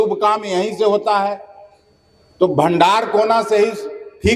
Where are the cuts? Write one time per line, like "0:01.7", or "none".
none